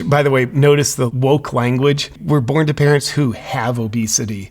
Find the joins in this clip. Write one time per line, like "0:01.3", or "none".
0:01.1
0:02.2